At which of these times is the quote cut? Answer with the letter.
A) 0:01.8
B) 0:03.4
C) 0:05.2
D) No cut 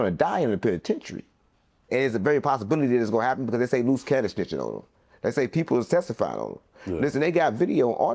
A